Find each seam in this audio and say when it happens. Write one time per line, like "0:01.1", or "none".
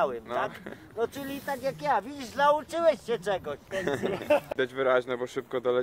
0:04.5

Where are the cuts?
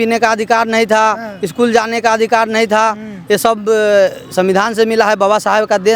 none

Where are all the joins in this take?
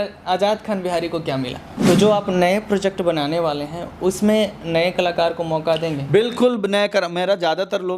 0:01.7

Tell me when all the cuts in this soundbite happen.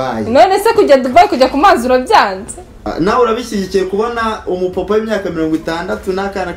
0:02.9

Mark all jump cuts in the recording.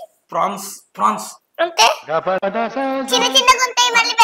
none

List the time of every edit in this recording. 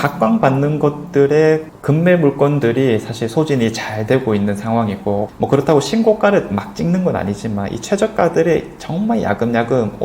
none

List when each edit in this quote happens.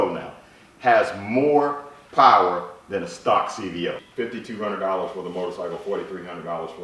0:04.0

